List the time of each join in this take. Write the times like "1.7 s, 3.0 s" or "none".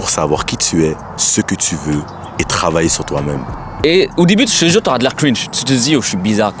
3.8 s